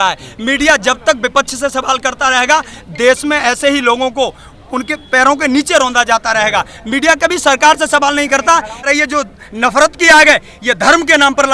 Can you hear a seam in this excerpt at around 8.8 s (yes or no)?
yes